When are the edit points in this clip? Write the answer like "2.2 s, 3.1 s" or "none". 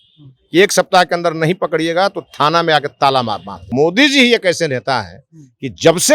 3.6 s